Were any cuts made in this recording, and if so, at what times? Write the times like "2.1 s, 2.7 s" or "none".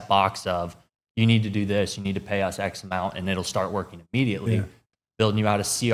4.9 s